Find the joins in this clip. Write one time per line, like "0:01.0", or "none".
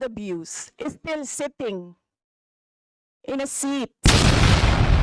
0:04.0